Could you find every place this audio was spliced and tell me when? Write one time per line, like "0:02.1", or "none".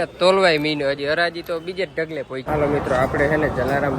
0:02.4